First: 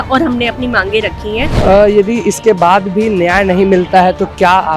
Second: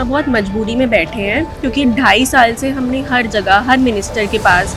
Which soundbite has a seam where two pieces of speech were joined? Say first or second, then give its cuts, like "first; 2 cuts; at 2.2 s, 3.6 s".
first; 1 cut; at 1.5 s